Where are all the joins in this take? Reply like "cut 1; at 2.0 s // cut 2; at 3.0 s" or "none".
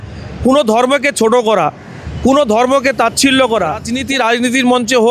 cut 1; at 3.9 s

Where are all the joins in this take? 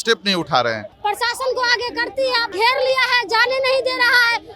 cut 1; at 0.9 s // cut 2; at 2.5 s

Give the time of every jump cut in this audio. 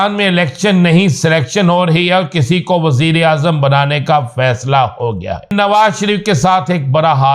cut 1; at 5.5 s

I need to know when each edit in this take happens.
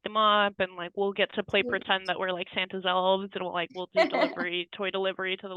none

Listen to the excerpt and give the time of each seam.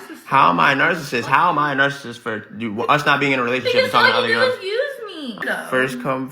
cut 1; at 5.4 s

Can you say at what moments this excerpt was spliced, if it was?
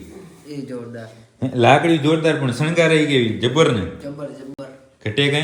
none

